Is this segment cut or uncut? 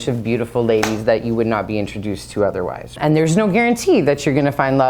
cut